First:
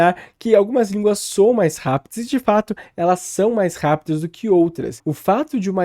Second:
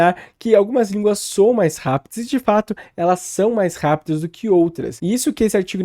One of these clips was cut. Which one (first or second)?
first